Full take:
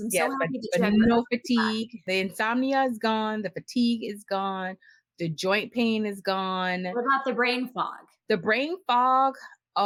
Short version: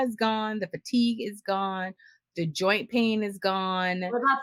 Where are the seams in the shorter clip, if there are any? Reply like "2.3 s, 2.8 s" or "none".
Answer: none